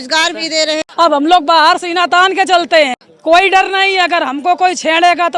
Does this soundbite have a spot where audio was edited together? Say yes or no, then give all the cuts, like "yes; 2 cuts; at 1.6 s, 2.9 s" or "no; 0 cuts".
yes; 2 cuts; at 0.8 s, 3.1 s